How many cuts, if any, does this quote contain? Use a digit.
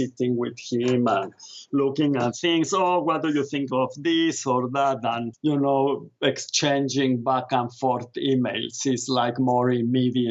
0